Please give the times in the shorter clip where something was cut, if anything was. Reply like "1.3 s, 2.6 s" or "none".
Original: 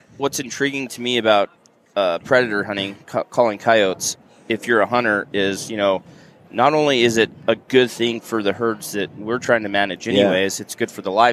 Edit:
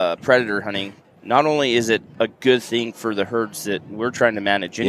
0.9 s